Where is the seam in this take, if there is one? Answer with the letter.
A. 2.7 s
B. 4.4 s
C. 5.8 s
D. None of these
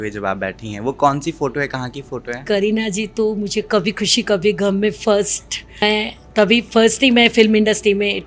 C